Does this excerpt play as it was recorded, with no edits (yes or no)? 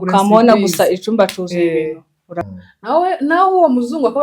no